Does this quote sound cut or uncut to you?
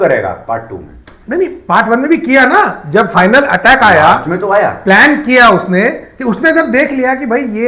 uncut